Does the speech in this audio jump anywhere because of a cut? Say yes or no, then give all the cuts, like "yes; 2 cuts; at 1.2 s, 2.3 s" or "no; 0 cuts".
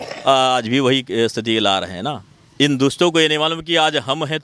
no; 0 cuts